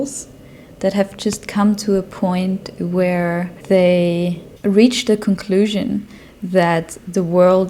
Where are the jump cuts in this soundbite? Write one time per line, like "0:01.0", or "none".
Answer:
none